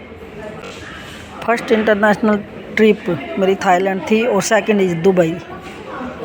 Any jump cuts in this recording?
yes; 1 cut; at 1.0 s

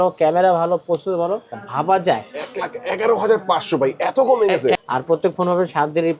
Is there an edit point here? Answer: yes; 2 cuts; at 1.6 s, 4.8 s

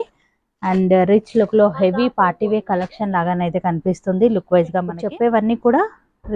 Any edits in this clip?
yes; 1 cut; at 4.9 s

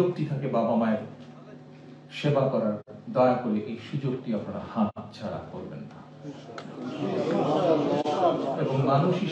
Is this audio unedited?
yes; 0 cuts

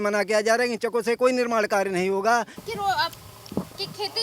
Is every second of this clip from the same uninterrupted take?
no; 1 cut; at 2.5 s

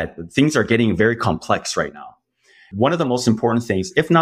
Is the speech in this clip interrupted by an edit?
yes; 1 cut; at 2.7 s

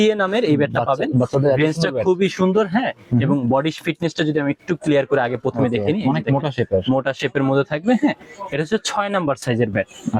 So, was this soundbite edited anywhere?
no; 0 cuts

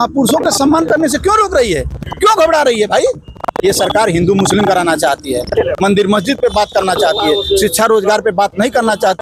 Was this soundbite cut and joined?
no; 0 cuts

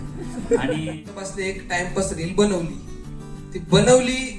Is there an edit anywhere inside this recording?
yes; 1 cut; at 1.2 s

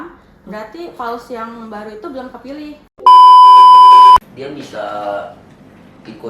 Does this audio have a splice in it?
yes; 2 cuts; at 3.0 s, 4.2 s

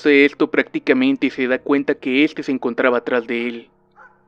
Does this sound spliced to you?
yes; 1 cut; at 2.2 s

